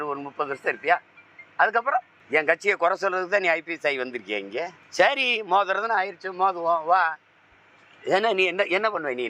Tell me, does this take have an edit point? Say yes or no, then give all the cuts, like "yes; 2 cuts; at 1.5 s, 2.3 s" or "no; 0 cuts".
yes; 2 cuts; at 2.2 s, 4.8 s